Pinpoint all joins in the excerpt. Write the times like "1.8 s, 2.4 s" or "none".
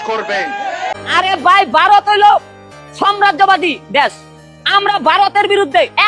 0.9 s